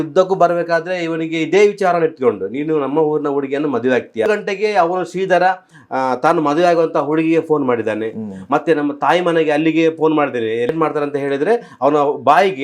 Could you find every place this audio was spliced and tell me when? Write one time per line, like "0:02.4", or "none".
0:04.3
0:10.7